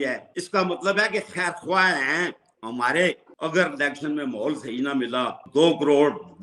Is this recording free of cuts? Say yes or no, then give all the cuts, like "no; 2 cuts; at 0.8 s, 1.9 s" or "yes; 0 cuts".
no; 1 cut; at 3.4 s